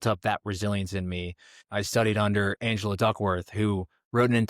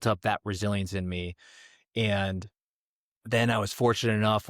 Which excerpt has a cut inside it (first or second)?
first